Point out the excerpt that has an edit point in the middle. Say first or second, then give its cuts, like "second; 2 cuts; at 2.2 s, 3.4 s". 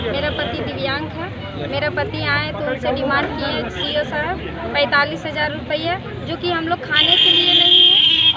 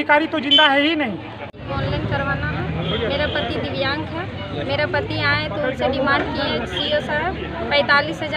second; 1 cut; at 1.3 s